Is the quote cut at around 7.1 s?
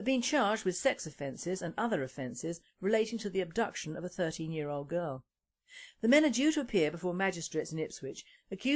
yes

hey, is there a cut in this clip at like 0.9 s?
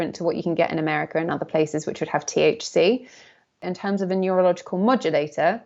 no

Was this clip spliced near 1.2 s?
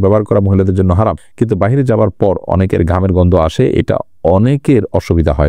yes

